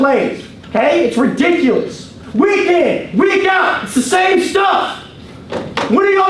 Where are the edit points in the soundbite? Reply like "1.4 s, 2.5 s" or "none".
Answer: 2.2 s